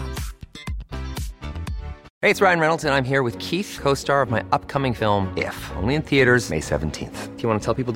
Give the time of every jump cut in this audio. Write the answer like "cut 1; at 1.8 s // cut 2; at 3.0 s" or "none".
cut 1; at 2.1 s